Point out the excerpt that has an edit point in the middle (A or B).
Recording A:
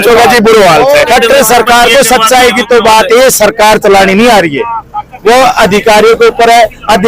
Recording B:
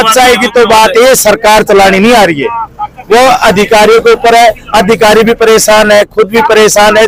A